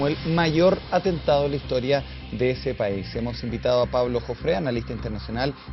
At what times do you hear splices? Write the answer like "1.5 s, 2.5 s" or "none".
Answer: none